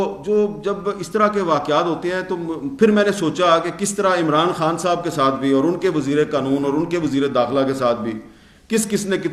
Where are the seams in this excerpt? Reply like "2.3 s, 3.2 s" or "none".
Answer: none